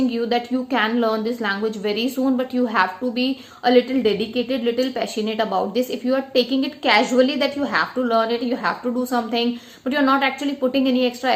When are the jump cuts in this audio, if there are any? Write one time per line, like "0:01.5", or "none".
none